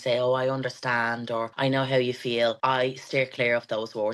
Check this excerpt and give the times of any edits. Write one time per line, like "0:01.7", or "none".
0:01.5
0:02.6